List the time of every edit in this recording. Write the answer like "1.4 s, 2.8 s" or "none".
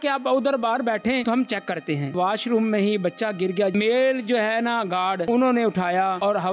2.1 s, 3.7 s

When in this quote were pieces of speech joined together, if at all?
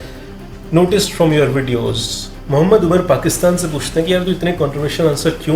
2.4 s

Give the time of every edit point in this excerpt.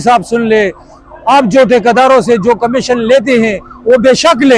none

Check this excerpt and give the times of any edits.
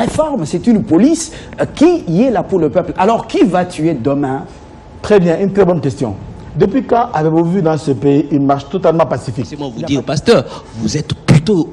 9.7 s

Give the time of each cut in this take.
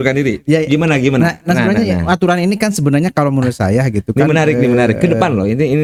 none

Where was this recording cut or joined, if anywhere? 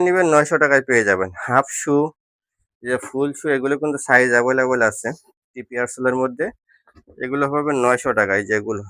none

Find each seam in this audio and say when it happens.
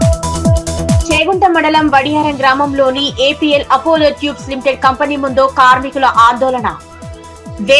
1.0 s

